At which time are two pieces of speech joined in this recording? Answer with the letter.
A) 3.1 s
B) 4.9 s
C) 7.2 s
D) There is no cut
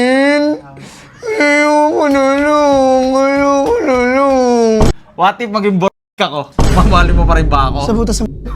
B